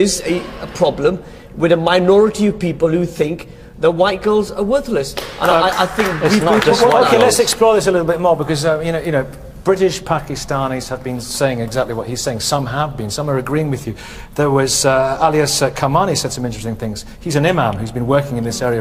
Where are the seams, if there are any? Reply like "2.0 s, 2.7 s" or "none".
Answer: none

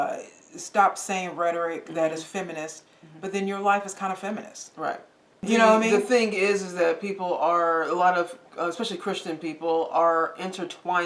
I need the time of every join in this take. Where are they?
5.3 s

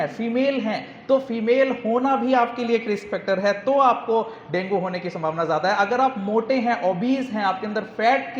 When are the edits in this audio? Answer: none

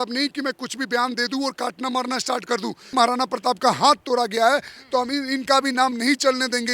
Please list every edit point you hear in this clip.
2.9 s

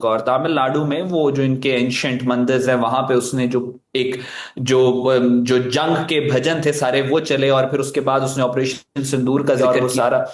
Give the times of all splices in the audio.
none

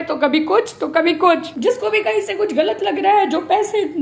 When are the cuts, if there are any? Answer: 1.5 s

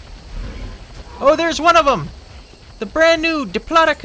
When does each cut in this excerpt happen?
1.2 s

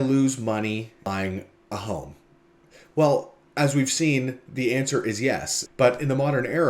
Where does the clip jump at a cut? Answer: 1.1 s, 5.6 s

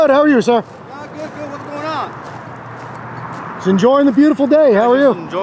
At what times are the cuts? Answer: none

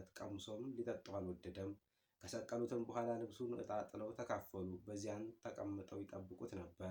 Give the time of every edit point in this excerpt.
none

